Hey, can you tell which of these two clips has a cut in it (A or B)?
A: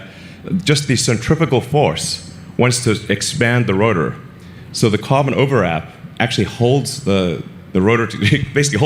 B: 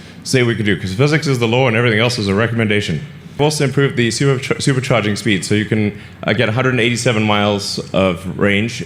B